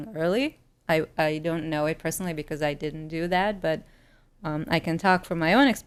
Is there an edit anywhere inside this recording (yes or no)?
no